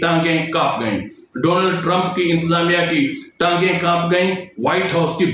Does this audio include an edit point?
no; 0 cuts

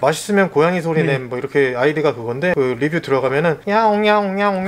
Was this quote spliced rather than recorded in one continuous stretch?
no; 0 cuts

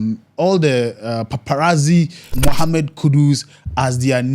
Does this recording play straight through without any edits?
no; 1 cut; at 2.3 s

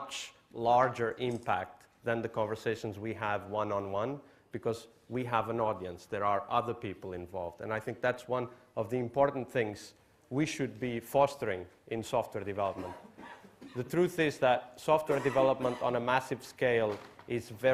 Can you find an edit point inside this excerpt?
no; 0 cuts

